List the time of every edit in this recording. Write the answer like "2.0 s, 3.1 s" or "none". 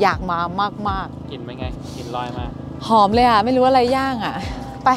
none